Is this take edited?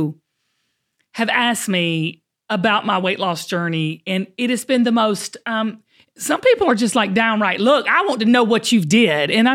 no; 0 cuts

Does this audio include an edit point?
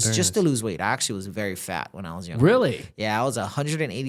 no; 0 cuts

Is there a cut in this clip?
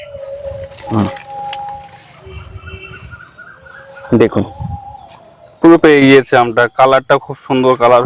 no; 0 cuts

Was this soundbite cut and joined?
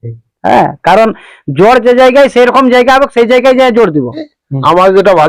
yes; 1 cut; at 4.3 s

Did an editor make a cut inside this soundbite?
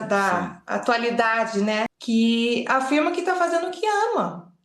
yes; 1 cut; at 2.0 s

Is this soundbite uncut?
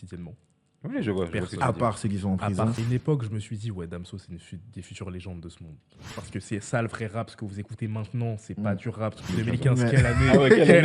no; 3 cuts; at 2.8 s, 6.1 s, 9.3 s

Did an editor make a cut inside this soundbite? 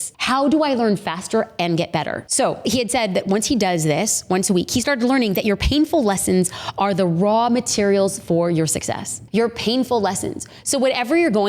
yes; 1 cut; at 2.2 s

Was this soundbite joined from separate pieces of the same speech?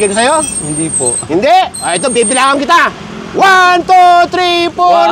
no; 0 cuts

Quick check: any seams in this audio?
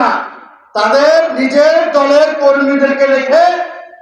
no; 0 cuts

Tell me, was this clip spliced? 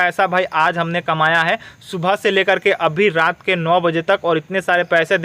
no; 0 cuts

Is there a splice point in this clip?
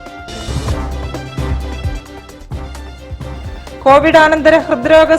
yes; 1 cut; at 2.6 s

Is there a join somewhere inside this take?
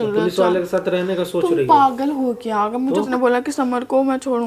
yes; 1 cut; at 3.1 s

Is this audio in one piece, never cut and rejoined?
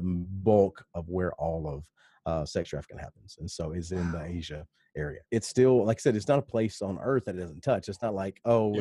no; 1 cut; at 5.2 s

